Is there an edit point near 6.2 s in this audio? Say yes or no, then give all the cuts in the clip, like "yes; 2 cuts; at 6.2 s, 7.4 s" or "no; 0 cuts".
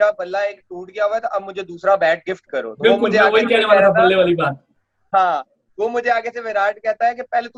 no; 0 cuts